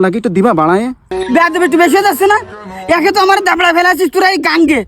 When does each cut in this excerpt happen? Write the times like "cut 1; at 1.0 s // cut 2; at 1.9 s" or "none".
cut 1; at 1.1 s